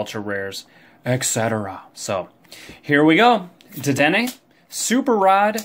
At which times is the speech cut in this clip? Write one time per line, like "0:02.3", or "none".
none

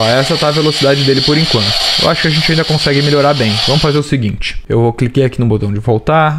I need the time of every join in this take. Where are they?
none

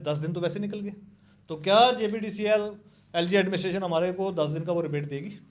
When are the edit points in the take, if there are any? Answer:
none

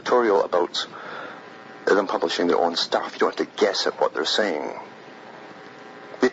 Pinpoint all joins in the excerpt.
none

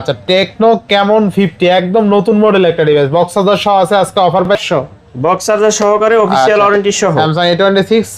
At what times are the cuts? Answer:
0:04.6

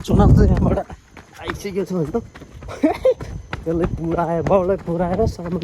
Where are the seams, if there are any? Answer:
none

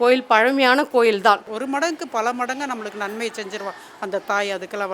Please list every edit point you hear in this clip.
0:01.5

